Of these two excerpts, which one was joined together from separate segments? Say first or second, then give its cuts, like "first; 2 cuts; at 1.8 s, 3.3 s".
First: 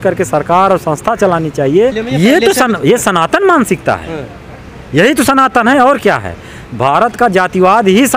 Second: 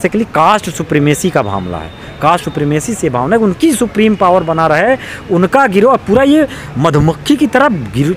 first; 1 cut; at 2.0 s